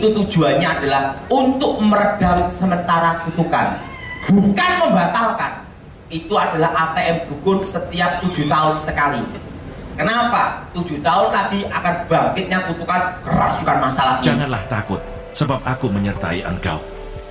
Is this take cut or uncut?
cut